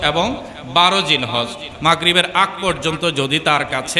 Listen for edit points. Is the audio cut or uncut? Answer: cut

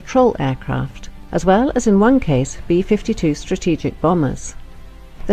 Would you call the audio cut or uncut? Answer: uncut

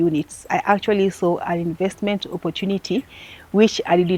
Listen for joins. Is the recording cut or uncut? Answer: uncut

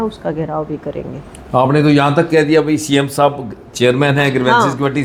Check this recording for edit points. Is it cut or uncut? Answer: uncut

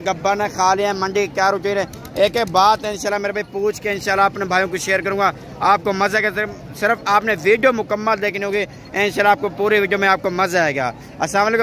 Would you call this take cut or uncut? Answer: uncut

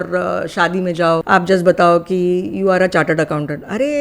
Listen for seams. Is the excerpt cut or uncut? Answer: cut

